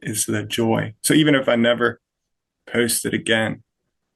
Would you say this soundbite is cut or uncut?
uncut